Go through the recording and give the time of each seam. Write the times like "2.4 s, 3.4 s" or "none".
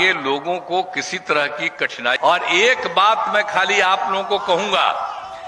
2.2 s